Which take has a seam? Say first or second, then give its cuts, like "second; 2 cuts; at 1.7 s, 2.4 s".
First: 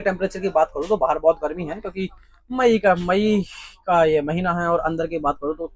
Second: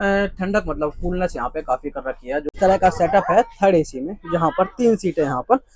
second; 1 cut; at 2.4 s